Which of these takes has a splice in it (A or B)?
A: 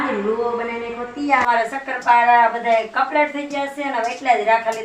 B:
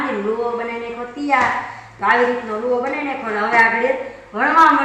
A